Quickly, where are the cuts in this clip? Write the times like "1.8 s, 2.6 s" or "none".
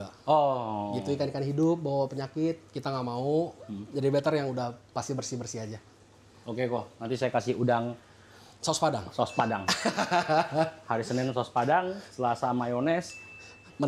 none